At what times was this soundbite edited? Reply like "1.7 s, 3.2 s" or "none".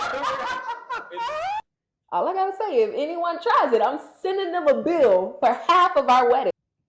1.6 s